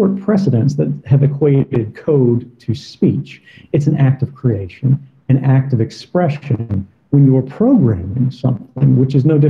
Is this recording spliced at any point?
yes; 1 cut; at 7.8 s

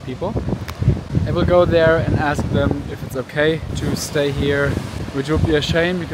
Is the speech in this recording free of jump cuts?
no; 3 cuts; at 1.1 s, 3.7 s, 5.0 s

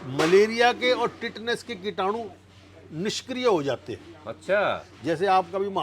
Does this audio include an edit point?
no; 0 cuts

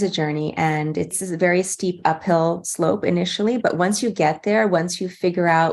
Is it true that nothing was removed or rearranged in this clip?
no; 1 cut; at 1.1 s

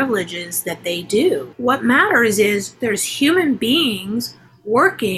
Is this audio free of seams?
no; 1 cut; at 1.5 s

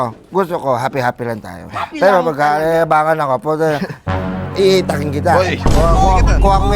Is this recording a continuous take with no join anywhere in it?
yes; 0 cuts

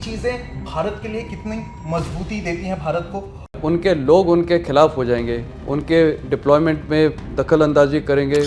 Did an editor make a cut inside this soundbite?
yes; 1 cut; at 3.6 s

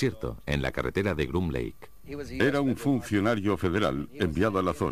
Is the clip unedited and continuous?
no; 1 cut; at 3.0 s

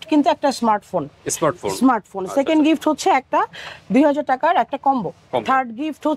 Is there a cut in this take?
no; 0 cuts

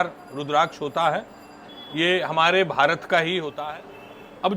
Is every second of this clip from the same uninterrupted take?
no; 1 cut; at 3.6 s

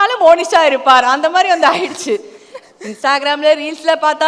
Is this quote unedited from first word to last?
yes; 0 cuts

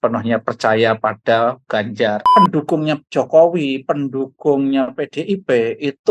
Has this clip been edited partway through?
yes; 1 cut; at 2.2 s

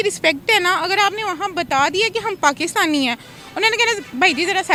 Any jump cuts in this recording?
no; 0 cuts

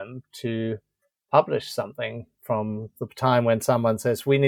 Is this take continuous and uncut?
yes; 0 cuts

